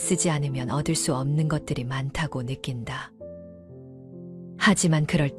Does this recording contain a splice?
yes; 2 cuts; at 3.1 s, 4.6 s

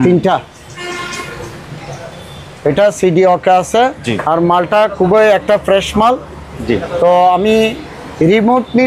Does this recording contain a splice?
no; 0 cuts

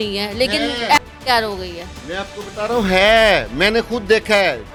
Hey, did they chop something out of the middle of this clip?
no; 0 cuts

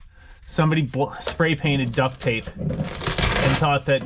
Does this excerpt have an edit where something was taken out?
no; 0 cuts

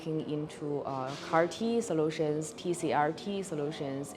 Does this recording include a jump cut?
no; 0 cuts

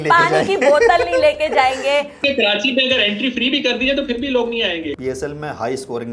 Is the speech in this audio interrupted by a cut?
yes; 2 cuts; at 2.2 s, 4.9 s

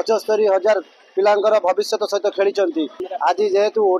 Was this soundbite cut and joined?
yes; 1 cut; at 3.0 s

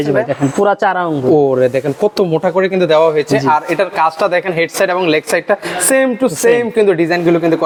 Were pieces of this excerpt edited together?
no; 0 cuts

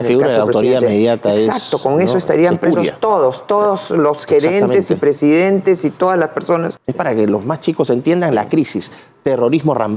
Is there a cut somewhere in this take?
yes; 1 cut; at 6.7 s

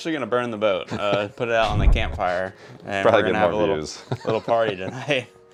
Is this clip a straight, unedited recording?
yes; 0 cuts

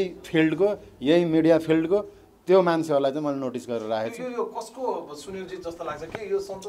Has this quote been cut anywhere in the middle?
no; 0 cuts

